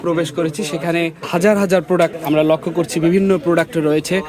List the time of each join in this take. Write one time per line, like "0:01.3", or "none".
0:01.2
0:02.2